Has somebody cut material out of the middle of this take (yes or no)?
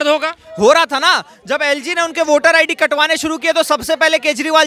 no